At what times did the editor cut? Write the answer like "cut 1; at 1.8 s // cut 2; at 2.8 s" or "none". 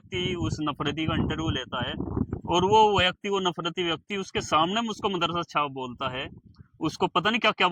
none